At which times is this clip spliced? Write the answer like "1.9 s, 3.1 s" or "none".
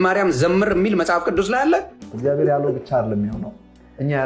2.0 s